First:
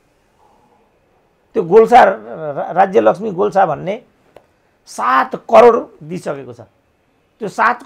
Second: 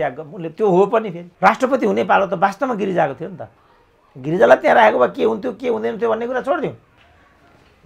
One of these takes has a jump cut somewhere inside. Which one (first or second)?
second